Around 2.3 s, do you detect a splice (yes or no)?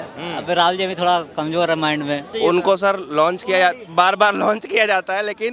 yes